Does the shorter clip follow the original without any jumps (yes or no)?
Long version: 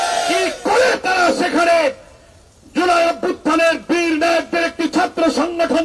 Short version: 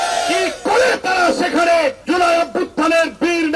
no